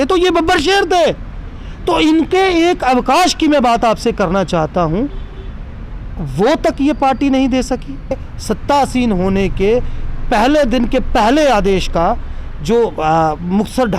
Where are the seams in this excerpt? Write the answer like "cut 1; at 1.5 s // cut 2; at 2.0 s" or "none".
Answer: cut 1; at 8.1 s